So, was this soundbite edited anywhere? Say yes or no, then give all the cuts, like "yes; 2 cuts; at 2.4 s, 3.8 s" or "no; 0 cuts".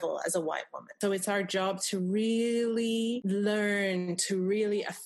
yes; 2 cuts; at 1.0 s, 3.2 s